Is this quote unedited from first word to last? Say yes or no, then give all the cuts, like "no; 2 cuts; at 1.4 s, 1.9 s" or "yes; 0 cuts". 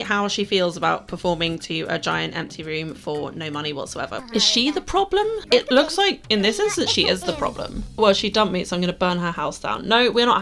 no; 2 cuts; at 4.2 s, 8.0 s